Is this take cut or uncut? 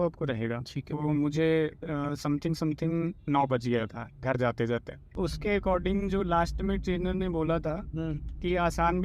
cut